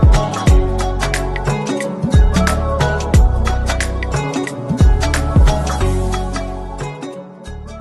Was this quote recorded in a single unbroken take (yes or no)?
yes